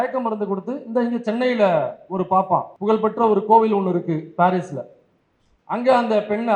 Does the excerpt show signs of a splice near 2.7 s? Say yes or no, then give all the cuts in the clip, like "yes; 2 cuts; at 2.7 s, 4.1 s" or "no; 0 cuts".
yes; 1 cut; at 2.7 s